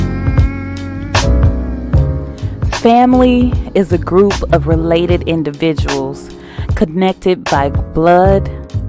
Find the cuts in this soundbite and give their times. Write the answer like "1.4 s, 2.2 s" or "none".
1.7 s